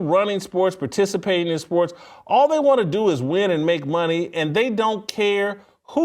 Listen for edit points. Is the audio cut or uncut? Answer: uncut